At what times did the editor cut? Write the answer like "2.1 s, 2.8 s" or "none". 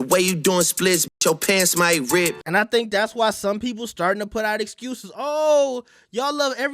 2.4 s